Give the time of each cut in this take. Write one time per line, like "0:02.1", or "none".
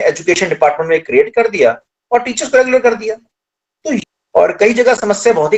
0:04.0